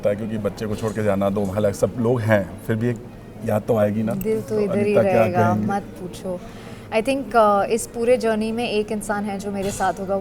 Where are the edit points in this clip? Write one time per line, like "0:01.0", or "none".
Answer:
none